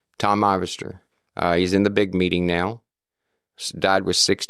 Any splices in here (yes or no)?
yes